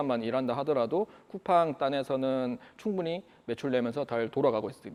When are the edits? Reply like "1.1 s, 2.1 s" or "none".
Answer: none

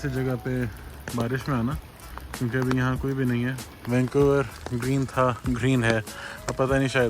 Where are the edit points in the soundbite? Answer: 3.7 s

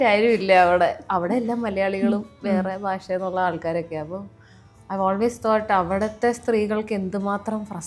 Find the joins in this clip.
none

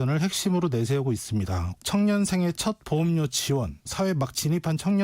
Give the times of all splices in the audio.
1.8 s

